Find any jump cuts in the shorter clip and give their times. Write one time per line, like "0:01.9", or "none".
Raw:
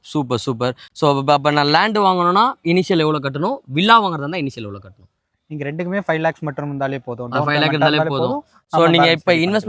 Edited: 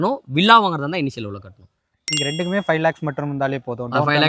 none